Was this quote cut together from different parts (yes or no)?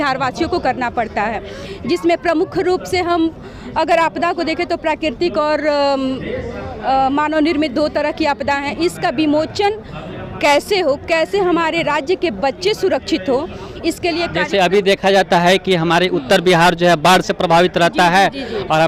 no